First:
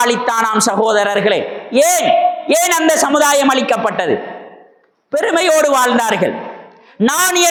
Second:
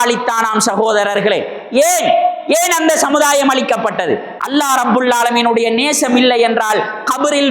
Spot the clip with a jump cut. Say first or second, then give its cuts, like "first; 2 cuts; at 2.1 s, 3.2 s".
second; 1 cut; at 4.3 s